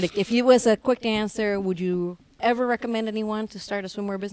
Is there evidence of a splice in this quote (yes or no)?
no